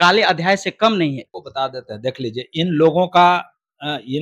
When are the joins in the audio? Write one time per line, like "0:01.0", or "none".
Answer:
none